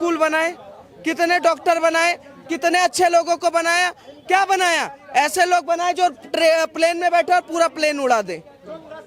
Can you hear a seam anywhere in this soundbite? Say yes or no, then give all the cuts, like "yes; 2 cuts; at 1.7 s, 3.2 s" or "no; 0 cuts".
no; 0 cuts